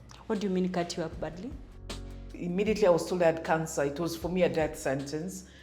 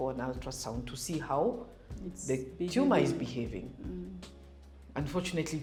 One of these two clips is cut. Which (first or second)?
first